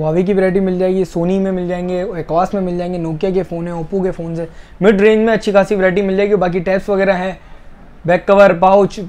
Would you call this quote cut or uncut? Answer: uncut